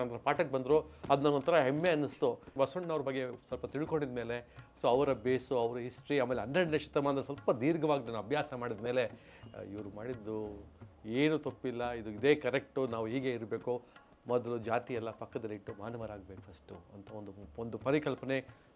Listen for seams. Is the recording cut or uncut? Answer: cut